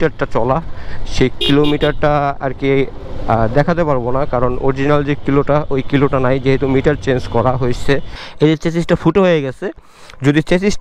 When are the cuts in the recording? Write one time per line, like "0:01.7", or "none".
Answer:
0:08.1